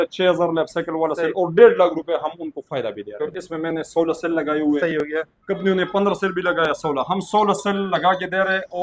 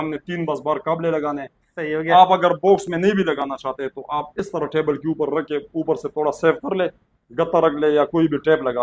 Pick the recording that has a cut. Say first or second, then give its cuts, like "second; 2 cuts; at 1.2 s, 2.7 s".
first; 1 cut; at 3.2 s